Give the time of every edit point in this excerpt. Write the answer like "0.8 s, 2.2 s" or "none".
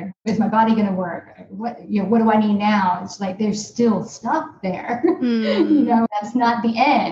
6.1 s